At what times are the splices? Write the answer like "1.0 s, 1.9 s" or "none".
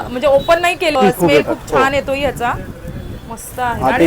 1.0 s